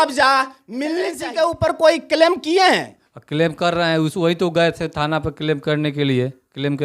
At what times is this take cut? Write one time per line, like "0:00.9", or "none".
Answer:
0:01.2